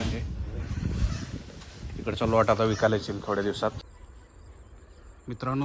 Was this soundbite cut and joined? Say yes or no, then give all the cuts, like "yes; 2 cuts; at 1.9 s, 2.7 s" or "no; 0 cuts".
yes; 1 cut; at 3.8 s